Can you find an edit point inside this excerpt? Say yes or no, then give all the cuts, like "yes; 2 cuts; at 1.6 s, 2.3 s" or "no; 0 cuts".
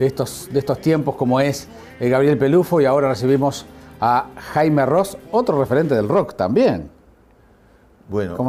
no; 0 cuts